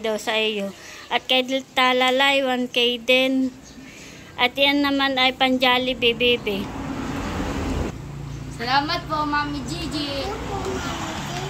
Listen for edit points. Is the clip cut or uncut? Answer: cut